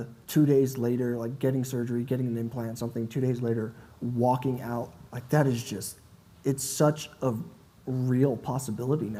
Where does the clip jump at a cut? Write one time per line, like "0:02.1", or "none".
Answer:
none